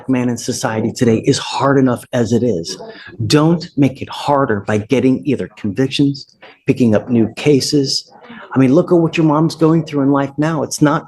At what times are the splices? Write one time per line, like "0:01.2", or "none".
none